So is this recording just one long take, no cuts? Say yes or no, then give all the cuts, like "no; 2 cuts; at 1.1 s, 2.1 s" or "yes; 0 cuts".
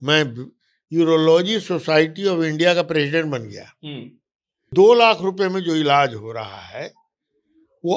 no; 1 cut; at 4.7 s